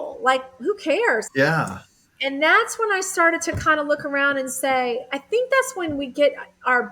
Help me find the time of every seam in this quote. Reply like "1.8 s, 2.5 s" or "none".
1.2 s